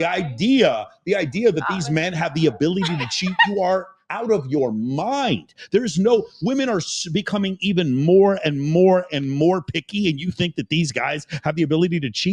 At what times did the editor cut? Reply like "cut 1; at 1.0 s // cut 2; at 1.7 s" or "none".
none